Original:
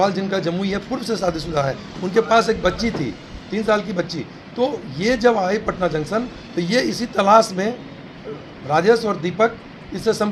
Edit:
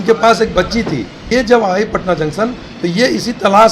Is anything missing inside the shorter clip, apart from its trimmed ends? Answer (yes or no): yes